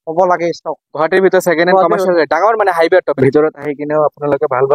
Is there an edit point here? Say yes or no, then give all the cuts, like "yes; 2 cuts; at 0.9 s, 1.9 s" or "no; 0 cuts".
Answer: yes; 1 cut; at 3.1 s